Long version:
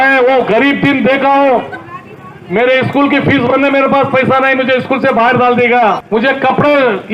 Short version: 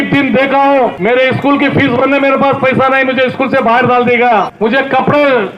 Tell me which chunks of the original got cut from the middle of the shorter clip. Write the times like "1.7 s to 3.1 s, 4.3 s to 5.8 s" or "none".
1.7 s to 2.5 s